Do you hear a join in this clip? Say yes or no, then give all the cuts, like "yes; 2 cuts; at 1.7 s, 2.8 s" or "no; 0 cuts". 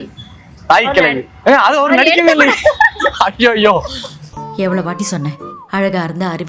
no; 0 cuts